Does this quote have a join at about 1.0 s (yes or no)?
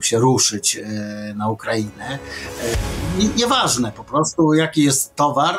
no